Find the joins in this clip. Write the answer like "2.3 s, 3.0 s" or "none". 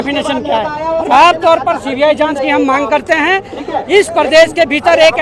1.1 s